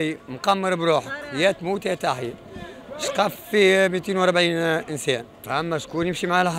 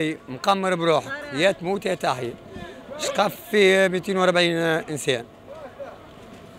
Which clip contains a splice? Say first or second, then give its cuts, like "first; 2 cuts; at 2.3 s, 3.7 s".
first; 1 cut; at 5.4 s